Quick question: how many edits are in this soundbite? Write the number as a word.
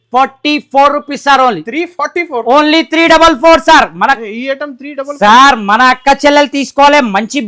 zero